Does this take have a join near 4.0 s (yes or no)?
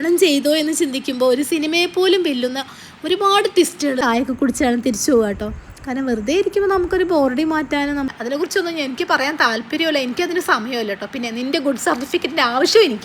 yes